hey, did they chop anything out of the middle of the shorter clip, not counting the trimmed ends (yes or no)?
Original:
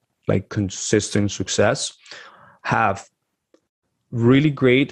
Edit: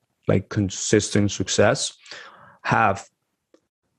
no